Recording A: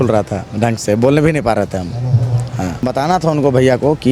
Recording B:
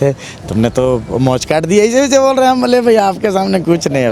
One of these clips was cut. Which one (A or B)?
A